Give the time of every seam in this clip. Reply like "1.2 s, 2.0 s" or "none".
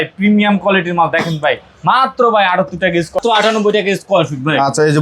3.2 s